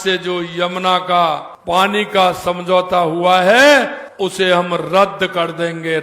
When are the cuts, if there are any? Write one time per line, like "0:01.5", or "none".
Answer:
0:01.5
0:04.0